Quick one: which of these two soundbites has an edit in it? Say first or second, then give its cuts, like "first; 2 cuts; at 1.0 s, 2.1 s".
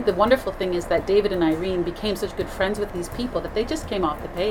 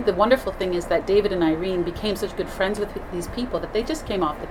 first; 1 cut; at 2.9 s